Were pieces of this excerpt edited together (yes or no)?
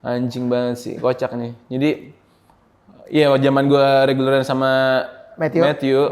no